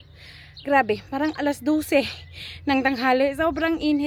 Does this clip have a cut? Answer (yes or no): no